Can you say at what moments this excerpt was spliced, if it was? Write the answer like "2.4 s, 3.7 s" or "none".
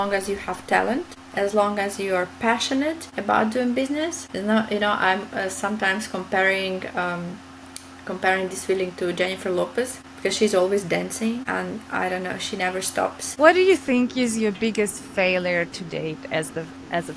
1.2 s, 3.1 s, 4.2 s, 10.0 s, 11.4 s, 13.2 s